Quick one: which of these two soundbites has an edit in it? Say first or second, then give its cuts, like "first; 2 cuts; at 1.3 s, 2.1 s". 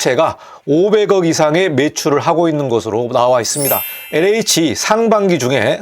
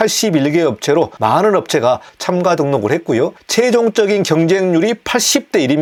first; 1 cut; at 3.9 s